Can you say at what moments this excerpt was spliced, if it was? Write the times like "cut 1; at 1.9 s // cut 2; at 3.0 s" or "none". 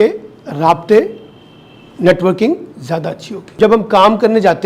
cut 1; at 3.5 s